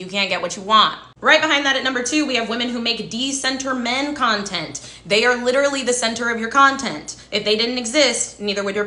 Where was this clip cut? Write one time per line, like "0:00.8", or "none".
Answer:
none